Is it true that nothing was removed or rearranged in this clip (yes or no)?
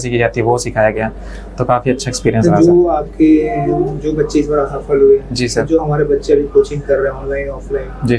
yes